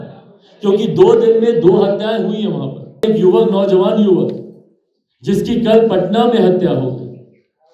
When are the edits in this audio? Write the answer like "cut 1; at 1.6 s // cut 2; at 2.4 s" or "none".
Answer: cut 1; at 3.0 s